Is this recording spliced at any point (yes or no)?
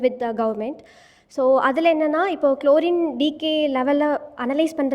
no